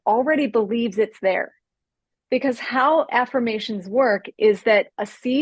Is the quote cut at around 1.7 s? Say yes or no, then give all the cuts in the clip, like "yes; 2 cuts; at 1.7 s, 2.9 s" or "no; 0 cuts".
yes; 1 cut; at 1.7 s